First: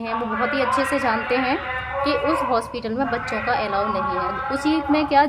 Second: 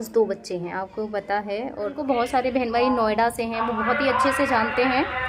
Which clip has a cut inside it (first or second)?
second